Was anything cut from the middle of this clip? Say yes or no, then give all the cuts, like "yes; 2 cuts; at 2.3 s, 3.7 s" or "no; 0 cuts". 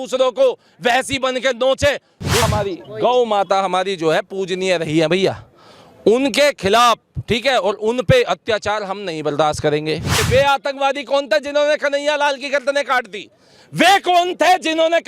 yes; 2 cuts; at 2.5 s, 10.2 s